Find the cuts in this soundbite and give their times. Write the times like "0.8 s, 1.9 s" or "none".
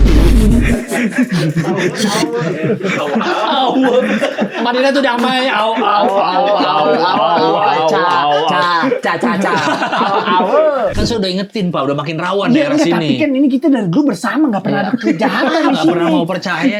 10.9 s